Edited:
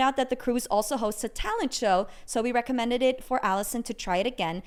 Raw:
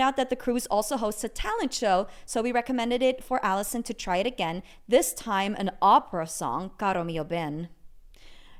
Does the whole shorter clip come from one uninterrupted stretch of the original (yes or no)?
yes